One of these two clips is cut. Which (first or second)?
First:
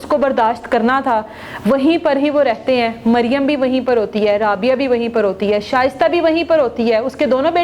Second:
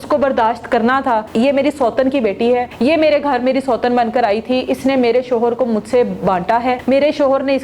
second